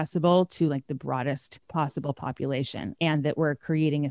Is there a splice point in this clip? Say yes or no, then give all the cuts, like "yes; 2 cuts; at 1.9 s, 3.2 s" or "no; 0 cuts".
yes; 2 cuts; at 1.5 s, 2.8 s